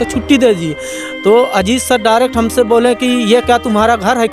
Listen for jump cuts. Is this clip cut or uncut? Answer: uncut